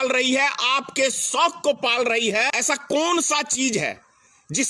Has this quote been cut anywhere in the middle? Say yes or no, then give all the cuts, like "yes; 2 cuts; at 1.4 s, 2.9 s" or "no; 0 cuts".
yes; 1 cut; at 2.5 s